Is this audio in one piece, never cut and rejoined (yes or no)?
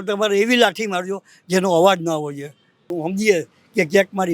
no